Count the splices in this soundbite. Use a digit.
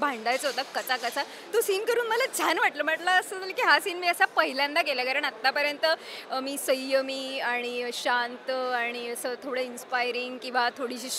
0